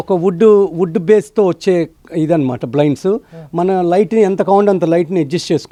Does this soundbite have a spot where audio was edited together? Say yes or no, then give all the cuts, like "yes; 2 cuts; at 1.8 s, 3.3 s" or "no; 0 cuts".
no; 0 cuts